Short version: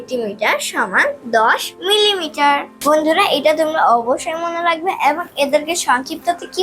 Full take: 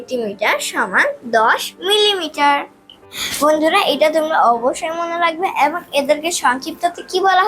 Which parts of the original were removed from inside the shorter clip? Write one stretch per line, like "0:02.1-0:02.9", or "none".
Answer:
0:02.7-0:03.3